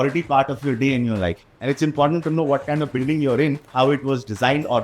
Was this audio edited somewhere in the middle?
yes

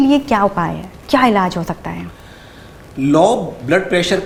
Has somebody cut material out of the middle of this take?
no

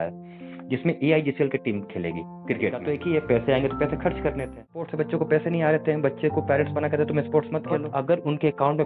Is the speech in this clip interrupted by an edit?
yes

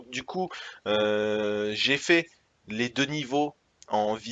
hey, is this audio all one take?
no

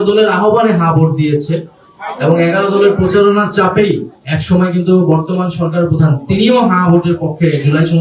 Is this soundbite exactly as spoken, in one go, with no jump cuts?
yes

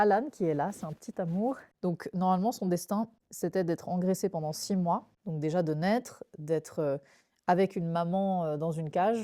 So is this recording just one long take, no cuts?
no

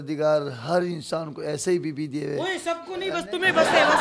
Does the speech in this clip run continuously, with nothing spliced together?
yes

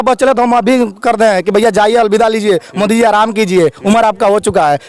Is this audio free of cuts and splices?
yes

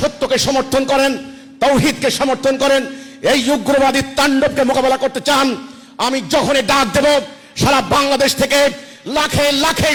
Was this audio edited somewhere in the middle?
no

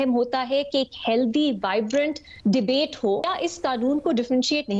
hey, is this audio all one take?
no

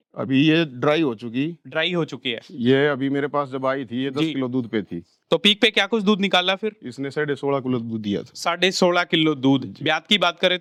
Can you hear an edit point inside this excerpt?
no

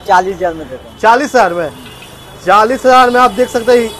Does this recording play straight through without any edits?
yes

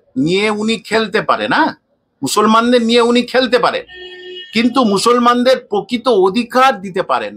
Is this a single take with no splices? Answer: yes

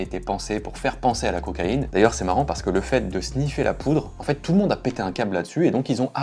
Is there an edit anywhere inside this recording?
yes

